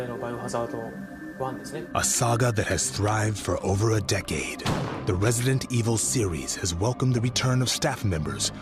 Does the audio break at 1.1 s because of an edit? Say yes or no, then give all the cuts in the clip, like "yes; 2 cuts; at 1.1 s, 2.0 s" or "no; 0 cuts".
no; 1 cut; at 6.3 s